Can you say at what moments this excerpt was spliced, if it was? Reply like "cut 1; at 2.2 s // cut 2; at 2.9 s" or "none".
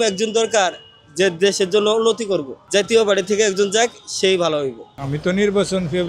cut 1; at 4.9 s